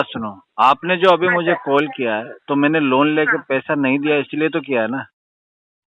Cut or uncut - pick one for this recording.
uncut